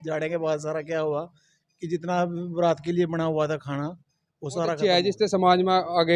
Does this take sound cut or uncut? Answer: cut